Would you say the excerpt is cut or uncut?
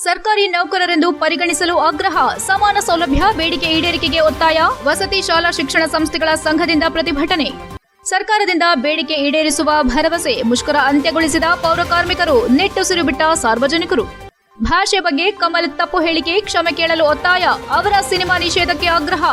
uncut